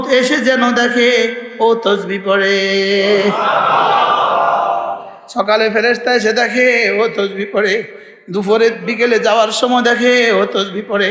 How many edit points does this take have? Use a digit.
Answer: 0